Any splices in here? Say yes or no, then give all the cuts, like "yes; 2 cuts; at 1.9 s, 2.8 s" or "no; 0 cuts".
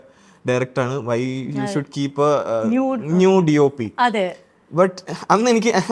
no; 0 cuts